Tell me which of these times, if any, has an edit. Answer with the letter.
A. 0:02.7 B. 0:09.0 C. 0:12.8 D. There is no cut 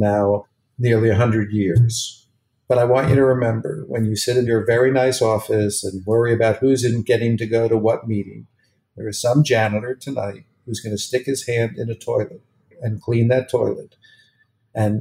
C